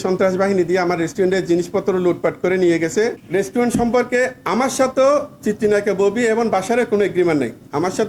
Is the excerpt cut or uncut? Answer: cut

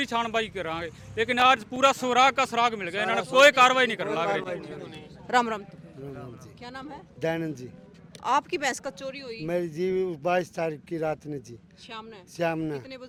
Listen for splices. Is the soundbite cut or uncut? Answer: uncut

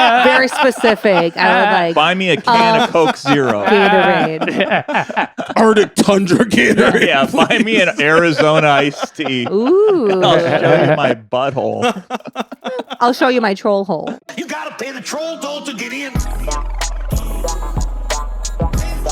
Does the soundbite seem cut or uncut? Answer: cut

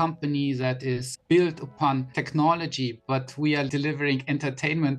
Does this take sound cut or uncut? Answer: cut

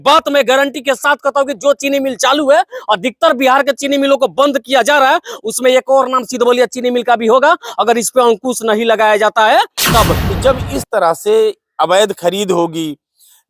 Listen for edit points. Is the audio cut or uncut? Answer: cut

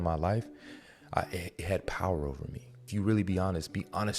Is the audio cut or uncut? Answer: cut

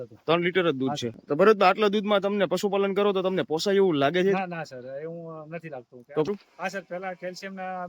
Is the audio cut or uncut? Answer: cut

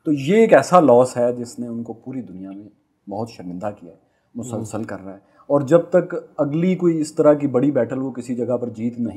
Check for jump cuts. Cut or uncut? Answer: uncut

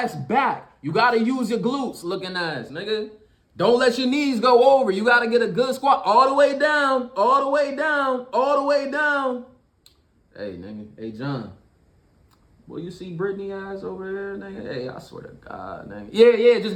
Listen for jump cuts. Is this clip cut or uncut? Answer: uncut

